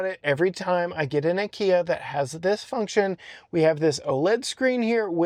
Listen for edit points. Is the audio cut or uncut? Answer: uncut